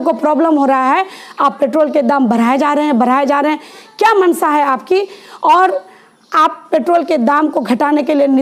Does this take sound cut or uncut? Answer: uncut